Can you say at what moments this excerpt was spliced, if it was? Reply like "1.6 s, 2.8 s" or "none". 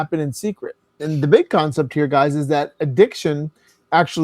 1.0 s